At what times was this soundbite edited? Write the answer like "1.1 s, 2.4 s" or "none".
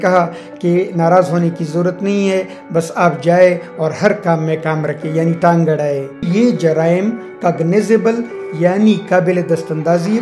6.3 s